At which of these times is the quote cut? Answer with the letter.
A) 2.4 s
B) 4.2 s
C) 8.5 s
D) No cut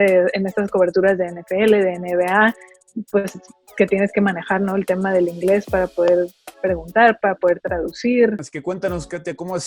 C